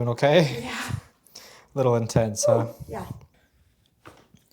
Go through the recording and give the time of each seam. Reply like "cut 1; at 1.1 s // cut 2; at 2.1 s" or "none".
cut 1; at 3.4 s